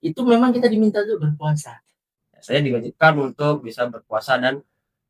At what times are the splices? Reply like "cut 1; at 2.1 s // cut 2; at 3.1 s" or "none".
cut 1; at 2.1 s